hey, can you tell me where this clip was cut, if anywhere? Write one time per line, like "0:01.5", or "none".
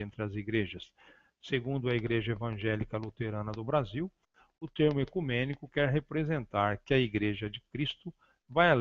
0:03.2